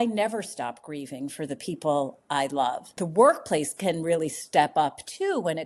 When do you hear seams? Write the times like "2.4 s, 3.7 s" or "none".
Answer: 2.9 s